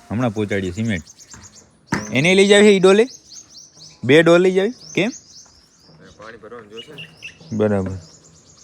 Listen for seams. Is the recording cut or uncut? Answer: uncut